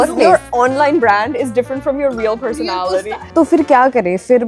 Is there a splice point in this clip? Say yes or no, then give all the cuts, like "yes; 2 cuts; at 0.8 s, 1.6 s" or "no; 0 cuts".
yes; 1 cut; at 3.3 s